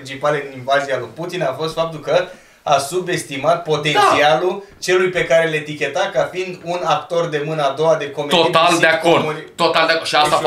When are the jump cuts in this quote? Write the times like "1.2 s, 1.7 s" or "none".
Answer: none

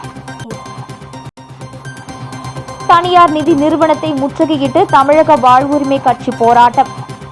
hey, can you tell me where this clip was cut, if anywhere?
1.3 s

